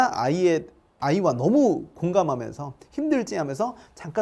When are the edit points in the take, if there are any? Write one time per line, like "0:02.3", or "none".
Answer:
none